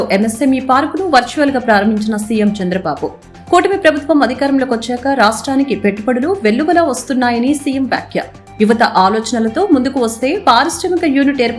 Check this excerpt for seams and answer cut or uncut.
uncut